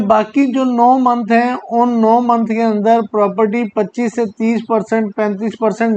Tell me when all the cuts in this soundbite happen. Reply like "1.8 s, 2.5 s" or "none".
none

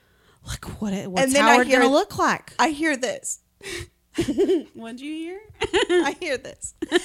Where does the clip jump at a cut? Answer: none

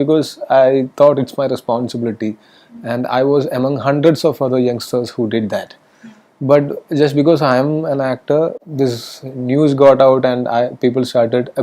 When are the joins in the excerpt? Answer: 8.6 s

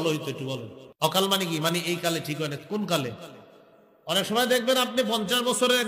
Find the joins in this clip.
1.1 s

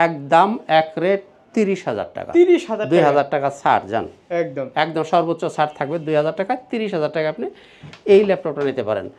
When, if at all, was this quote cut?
none

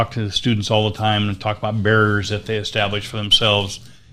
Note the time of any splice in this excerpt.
none

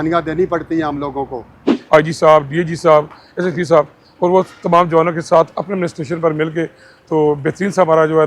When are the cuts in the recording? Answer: 1.7 s

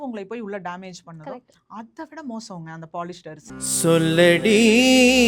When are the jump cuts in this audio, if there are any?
3.5 s

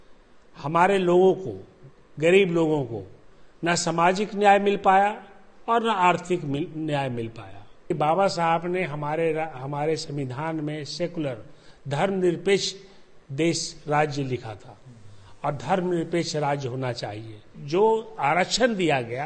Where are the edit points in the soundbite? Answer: 7.9 s, 17.5 s

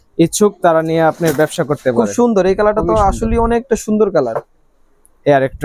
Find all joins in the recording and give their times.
none

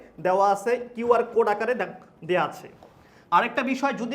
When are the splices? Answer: 3.1 s

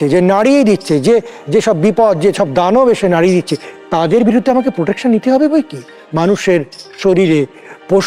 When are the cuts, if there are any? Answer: 6.0 s

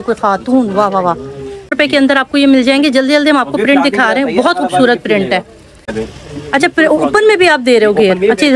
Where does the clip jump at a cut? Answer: 1.7 s, 5.8 s

